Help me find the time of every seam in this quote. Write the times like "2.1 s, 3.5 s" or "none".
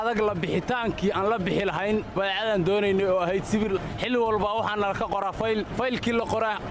3.8 s, 5.7 s